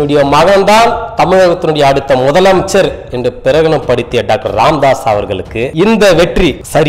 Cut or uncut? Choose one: uncut